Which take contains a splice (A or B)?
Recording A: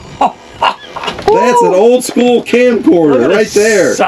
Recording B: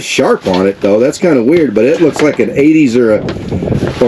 A